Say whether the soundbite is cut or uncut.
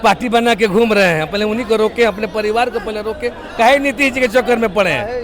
uncut